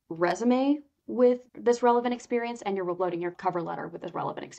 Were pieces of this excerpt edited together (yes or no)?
yes